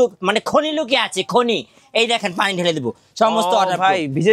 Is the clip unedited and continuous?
yes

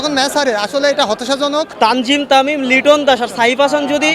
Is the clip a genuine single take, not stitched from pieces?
no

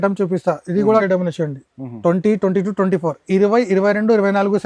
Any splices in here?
yes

